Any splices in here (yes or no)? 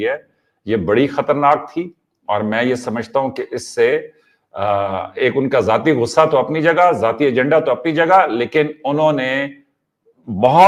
no